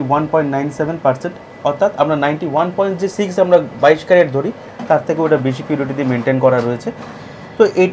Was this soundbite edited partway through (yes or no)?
no